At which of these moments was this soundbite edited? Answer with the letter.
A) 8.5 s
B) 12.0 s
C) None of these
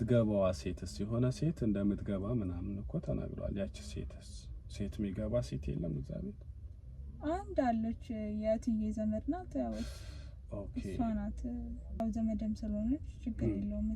B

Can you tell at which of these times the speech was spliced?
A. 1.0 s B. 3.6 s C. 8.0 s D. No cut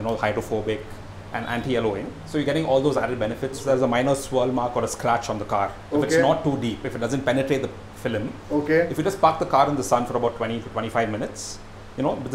B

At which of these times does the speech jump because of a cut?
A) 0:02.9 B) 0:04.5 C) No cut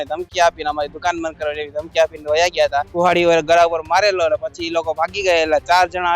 A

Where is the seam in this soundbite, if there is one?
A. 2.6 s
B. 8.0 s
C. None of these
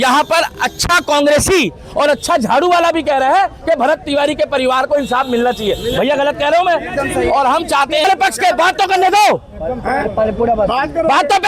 B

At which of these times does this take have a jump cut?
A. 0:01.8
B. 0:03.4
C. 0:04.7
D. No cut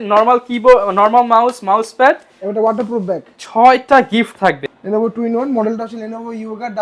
C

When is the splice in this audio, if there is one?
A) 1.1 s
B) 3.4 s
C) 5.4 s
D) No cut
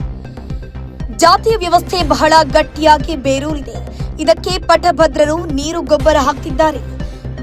A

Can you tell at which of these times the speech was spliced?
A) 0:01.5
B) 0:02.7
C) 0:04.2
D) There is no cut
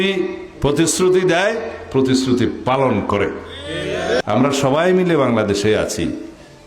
C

